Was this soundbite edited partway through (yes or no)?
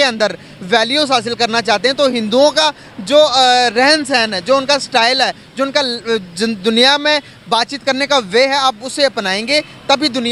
no